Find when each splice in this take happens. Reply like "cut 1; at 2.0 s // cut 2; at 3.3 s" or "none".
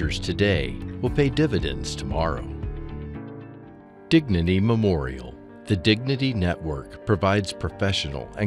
none